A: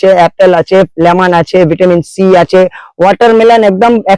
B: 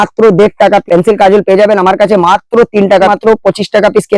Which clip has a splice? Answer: B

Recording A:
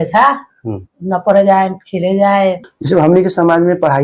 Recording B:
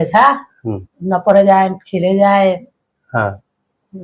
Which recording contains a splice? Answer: A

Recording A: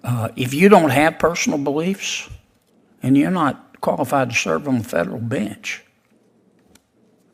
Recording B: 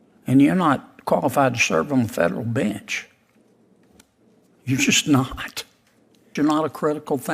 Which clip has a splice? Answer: B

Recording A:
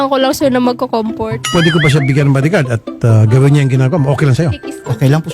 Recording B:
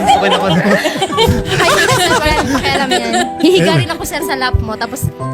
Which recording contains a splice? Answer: A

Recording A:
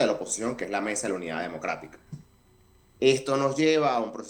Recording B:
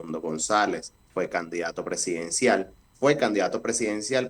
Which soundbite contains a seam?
B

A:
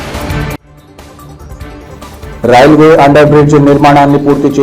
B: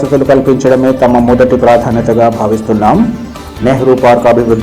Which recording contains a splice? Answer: A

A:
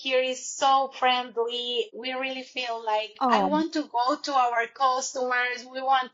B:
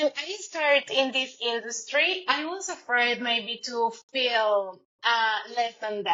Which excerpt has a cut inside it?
A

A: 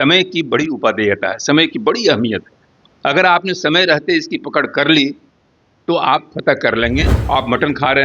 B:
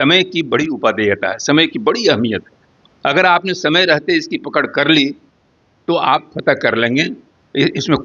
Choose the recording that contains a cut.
A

